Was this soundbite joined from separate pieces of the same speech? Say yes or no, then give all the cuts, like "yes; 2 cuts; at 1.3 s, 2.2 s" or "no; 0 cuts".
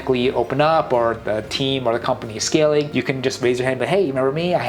no; 0 cuts